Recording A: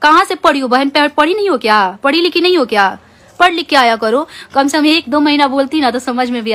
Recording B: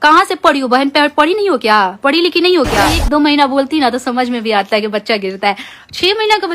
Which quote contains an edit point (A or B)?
B